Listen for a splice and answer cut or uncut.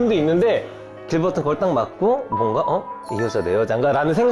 cut